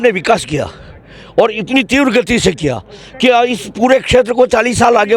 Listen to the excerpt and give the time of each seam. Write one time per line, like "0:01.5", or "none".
none